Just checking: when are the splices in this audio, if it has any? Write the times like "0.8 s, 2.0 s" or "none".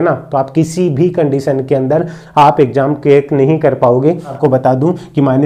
4.4 s